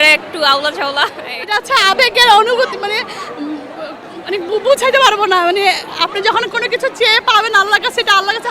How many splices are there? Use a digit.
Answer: 1